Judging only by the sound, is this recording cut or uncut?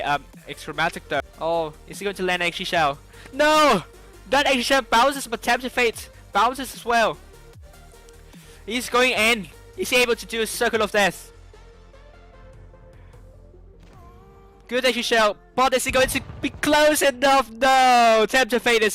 uncut